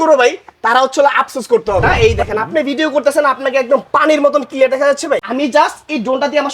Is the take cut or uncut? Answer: cut